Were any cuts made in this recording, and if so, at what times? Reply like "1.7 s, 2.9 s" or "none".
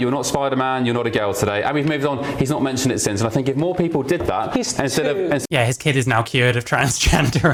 none